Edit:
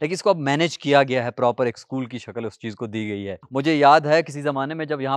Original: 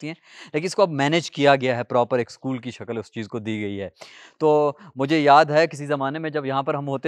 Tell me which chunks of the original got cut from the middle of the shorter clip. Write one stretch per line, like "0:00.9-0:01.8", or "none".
0:03.9-0:04.9